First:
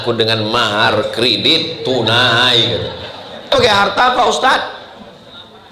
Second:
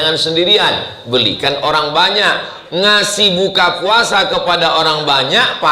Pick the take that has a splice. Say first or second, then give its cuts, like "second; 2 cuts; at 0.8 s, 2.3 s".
first; 1 cut; at 3.5 s